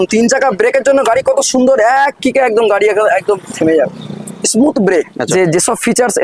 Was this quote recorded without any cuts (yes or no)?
no